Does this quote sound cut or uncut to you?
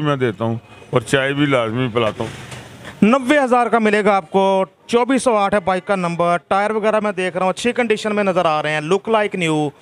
cut